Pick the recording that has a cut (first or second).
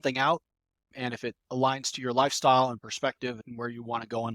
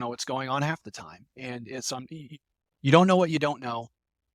first